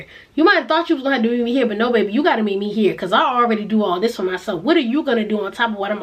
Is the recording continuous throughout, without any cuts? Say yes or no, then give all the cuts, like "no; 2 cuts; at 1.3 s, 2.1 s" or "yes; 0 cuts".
yes; 0 cuts